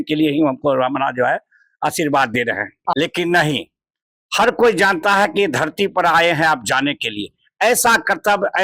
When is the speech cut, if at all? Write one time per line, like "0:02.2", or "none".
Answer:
0:02.9